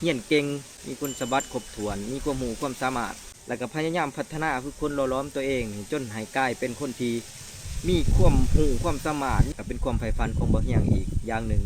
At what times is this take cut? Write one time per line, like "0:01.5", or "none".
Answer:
0:03.3
0:09.5